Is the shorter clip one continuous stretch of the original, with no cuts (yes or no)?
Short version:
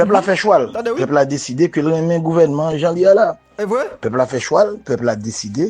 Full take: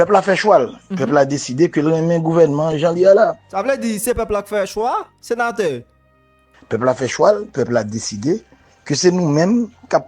no